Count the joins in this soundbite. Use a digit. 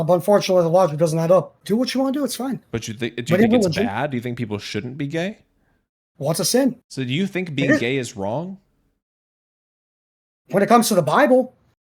2